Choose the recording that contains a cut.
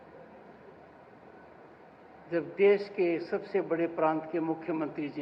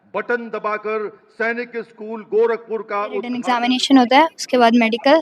second; 1 cut; at 3.3 s

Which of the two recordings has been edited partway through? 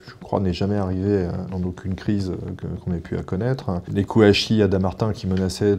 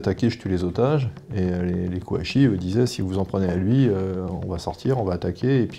first; 2 cuts; at 1.4 s, 3.8 s

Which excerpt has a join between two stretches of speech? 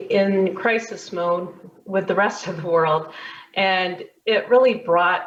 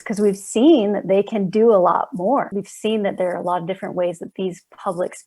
second; 1 cut; at 2.5 s

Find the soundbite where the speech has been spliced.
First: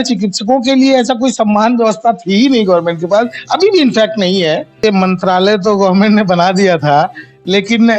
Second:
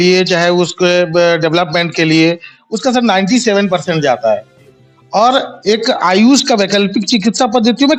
first; 1 cut; at 4.8 s

